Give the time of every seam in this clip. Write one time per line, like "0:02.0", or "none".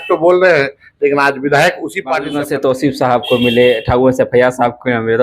0:02.2